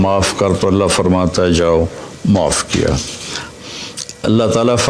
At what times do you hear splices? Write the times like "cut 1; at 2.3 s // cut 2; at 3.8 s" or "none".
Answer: cut 1; at 3.5 s